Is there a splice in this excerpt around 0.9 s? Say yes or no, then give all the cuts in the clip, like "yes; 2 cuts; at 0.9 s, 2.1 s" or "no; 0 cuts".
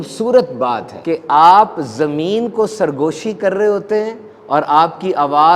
yes; 1 cut; at 0.9 s